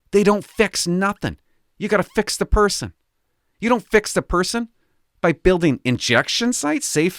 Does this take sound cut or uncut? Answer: uncut